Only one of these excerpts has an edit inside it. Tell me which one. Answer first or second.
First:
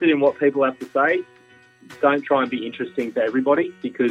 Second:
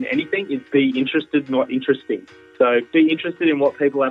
second